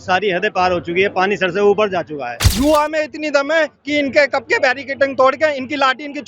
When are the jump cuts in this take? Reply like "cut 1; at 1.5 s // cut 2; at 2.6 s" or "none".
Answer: cut 1; at 2.4 s